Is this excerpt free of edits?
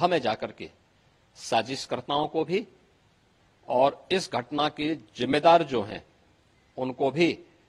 yes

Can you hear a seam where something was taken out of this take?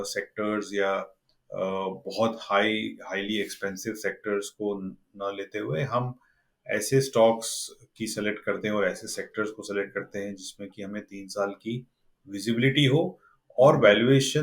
no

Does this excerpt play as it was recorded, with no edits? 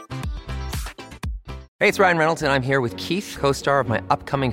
no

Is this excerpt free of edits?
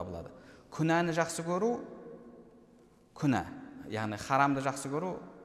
yes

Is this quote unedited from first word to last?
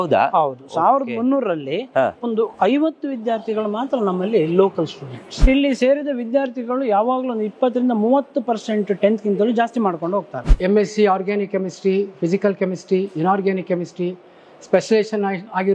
no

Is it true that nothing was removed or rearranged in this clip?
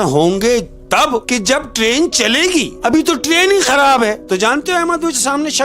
no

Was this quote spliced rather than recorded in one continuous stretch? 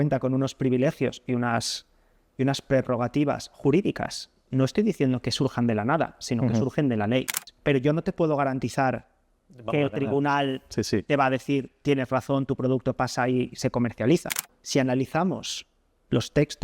yes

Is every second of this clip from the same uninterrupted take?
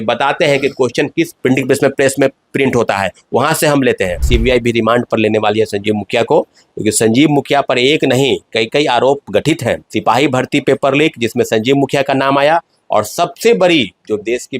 no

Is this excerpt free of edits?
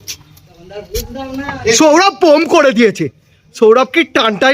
yes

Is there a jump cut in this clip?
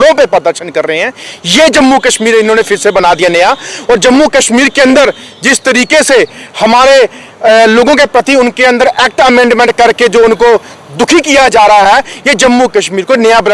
no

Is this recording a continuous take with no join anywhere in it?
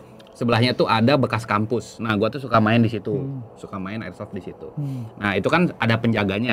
yes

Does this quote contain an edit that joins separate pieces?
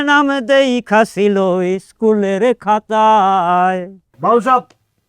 yes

